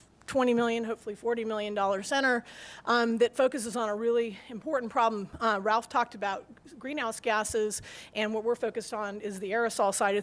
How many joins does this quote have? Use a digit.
0